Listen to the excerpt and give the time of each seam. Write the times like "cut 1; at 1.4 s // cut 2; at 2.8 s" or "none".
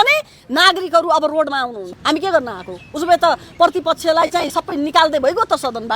cut 1; at 1.9 s